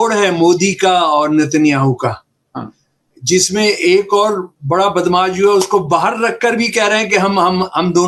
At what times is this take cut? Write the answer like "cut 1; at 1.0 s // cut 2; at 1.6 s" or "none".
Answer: none